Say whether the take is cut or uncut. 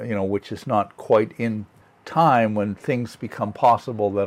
uncut